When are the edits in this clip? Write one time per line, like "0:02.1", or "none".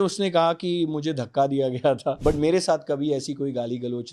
0:02.2